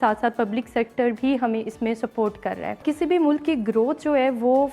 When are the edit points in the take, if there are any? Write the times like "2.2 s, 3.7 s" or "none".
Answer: 2.8 s